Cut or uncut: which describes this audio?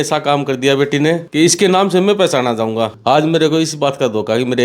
cut